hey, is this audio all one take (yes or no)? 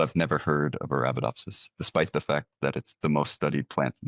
yes